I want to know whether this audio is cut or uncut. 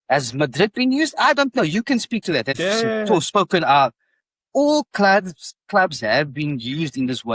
cut